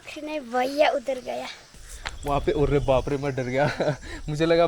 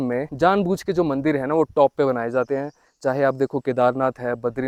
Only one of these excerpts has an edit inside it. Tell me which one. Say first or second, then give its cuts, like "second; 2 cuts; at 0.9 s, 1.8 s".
first; 1 cut; at 1.7 s